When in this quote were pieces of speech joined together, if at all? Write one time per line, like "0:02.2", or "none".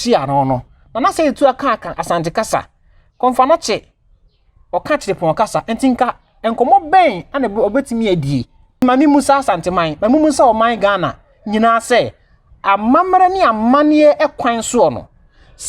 0:08.8